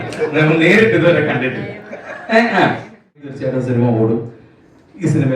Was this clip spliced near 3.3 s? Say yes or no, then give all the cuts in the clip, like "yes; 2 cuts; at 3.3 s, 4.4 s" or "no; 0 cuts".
yes; 1 cut; at 3.3 s